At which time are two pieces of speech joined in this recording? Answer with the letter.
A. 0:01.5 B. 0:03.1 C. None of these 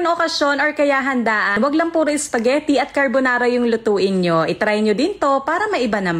A